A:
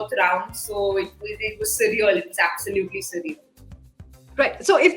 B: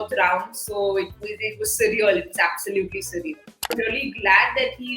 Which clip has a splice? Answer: B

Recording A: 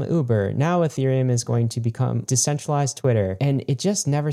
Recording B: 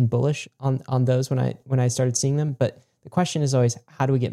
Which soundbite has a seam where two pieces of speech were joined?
A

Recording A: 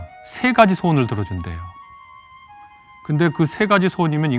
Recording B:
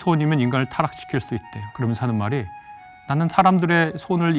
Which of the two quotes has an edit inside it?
B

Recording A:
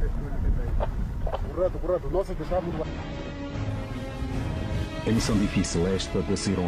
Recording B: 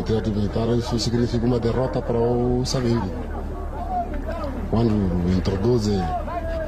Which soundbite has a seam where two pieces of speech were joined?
A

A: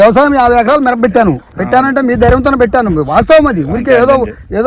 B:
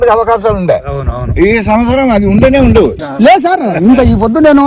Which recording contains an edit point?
B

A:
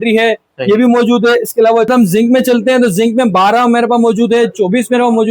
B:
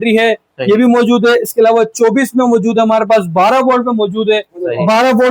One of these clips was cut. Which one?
A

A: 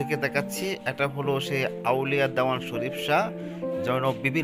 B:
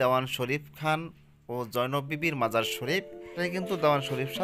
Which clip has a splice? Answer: B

